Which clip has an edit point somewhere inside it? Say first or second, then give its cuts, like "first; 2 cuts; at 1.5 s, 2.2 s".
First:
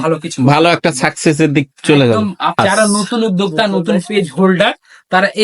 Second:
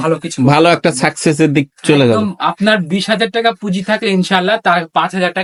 first; 1 cut; at 2.6 s